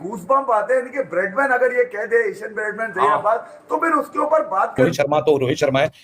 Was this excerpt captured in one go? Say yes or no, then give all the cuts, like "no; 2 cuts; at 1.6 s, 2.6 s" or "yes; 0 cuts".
no; 1 cut; at 4.9 s